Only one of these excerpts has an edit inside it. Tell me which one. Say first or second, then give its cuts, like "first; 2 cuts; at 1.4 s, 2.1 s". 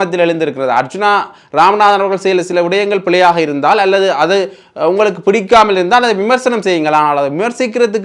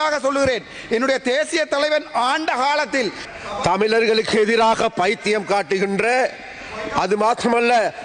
second; 1 cut; at 3.2 s